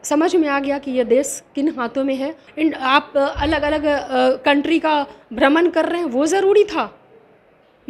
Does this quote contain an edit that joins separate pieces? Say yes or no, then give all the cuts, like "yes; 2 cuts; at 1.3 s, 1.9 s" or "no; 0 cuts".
yes; 1 cut; at 2.4 s